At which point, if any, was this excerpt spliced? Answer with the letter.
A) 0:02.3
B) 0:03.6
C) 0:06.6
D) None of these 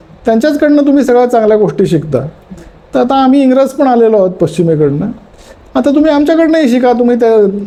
D